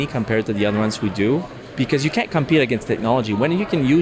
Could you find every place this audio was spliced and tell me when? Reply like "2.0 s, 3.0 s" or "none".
1.6 s